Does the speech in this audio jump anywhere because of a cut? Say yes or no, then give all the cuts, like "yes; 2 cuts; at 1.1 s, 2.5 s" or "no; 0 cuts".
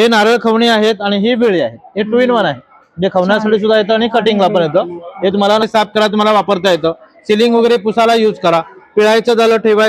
yes; 1 cut; at 5.6 s